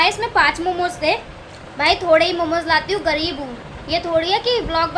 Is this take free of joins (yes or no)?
no